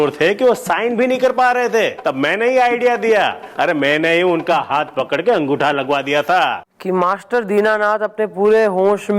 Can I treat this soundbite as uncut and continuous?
no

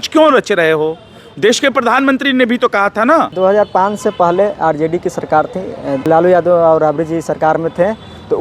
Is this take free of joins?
no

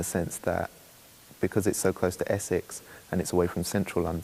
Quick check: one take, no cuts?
yes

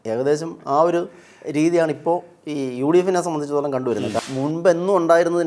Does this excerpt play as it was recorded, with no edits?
no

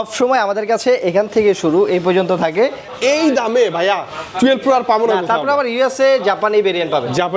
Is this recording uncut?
no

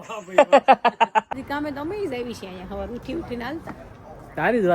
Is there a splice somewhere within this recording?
yes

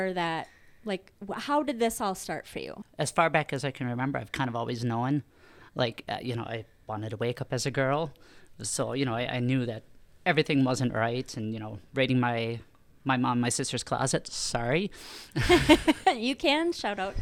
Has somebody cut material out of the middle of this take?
yes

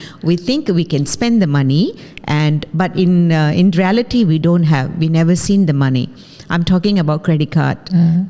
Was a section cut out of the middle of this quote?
no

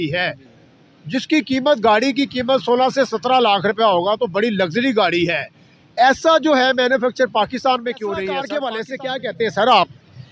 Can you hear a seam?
yes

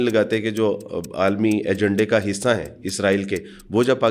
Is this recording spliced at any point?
no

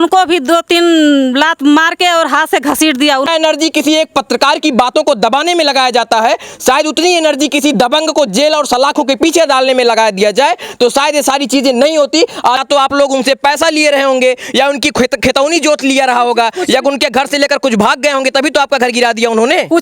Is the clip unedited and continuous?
no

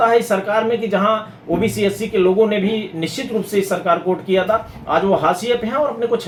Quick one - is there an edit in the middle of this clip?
no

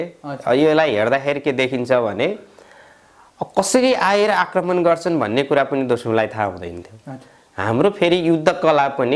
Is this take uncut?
yes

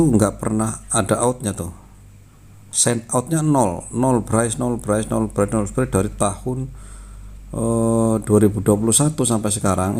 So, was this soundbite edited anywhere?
no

